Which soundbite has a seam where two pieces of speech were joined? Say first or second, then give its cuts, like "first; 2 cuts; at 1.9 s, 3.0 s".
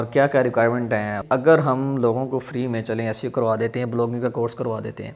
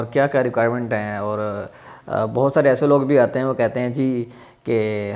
first; 1 cut; at 1.2 s